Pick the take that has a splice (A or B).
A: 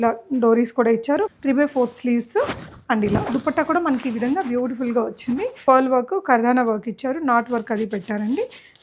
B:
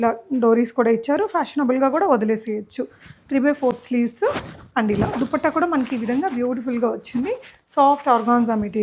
A